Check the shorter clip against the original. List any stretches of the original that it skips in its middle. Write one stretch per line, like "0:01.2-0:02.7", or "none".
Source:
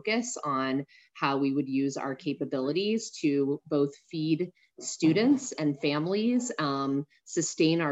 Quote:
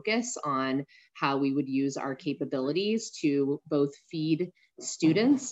none